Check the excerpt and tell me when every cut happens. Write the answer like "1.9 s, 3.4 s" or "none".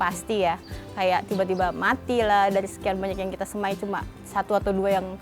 none